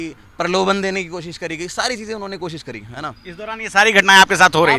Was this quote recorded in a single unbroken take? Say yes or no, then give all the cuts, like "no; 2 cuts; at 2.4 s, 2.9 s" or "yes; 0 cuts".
yes; 0 cuts